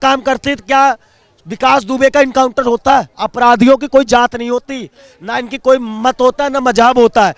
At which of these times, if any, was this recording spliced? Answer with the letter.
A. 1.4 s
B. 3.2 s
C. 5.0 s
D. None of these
B